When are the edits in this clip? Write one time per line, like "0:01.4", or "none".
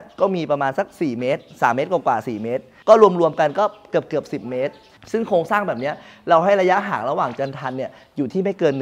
0:05.0